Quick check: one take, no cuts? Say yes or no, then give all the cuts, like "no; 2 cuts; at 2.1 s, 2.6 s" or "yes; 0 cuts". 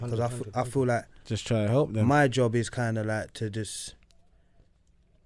yes; 0 cuts